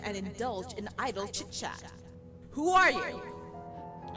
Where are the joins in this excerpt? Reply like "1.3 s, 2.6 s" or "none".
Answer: 3.2 s

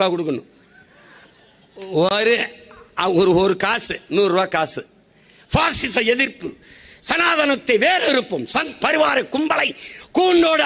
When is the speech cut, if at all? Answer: none

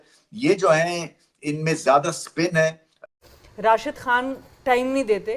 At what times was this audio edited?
3.1 s

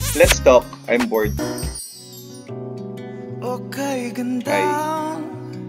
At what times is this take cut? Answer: 1.5 s

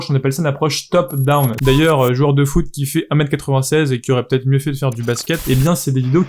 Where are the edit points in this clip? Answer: 1.6 s, 5.5 s

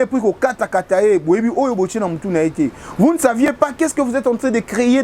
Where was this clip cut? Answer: none

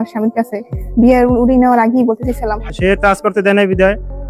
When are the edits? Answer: 2.7 s

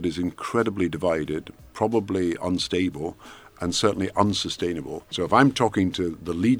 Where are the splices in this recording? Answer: 5.1 s

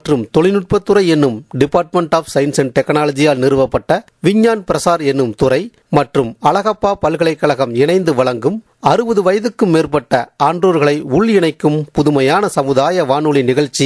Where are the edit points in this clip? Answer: none

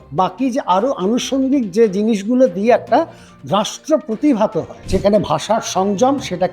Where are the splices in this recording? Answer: 4.7 s

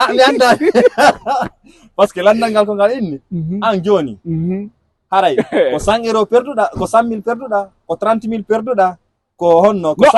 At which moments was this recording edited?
none

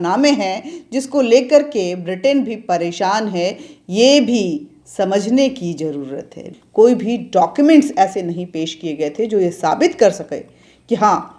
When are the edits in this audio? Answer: 6.4 s

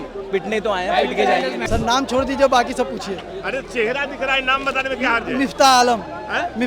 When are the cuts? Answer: 1.6 s

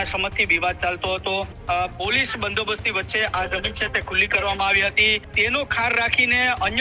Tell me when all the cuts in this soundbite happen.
1.6 s, 5.3 s

